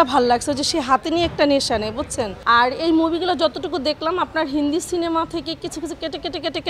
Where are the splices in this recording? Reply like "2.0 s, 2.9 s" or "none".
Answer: 2.3 s